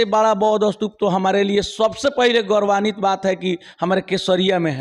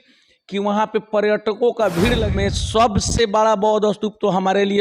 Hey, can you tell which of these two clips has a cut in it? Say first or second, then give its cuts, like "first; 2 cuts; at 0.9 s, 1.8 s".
second; 1 cut; at 2.2 s